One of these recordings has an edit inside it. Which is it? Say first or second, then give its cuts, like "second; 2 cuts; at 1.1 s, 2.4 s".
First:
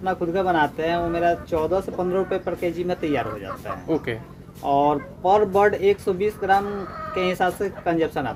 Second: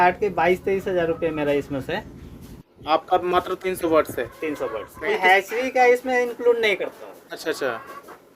second; 1 cut; at 5.1 s